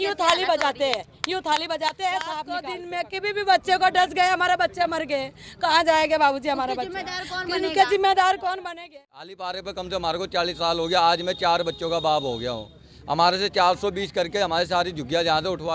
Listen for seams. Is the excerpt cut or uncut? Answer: cut